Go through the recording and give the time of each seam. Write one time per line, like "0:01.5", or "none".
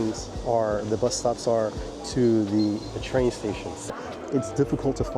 0:04.0